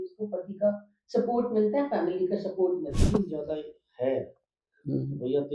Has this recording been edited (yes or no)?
yes